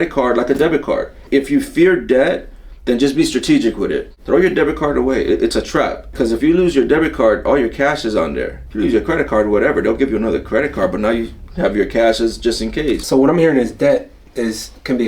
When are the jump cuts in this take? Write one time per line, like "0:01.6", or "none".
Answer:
0:01.2
0:04.1
0:06.1
0:08.6
0:13.0